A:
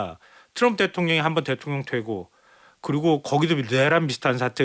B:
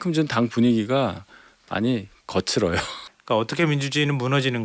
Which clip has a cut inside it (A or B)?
B